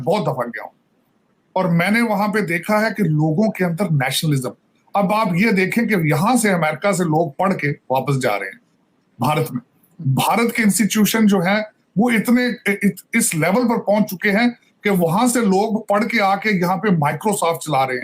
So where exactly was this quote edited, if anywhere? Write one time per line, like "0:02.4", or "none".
none

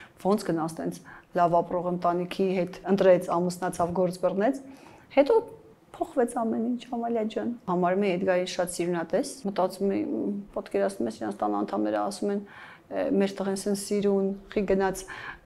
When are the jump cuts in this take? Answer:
0:02.8
0:07.7
0:09.4

